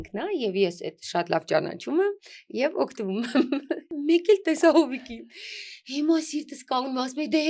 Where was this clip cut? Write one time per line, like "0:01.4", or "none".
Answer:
0:03.9